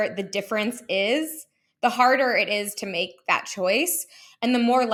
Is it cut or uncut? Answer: uncut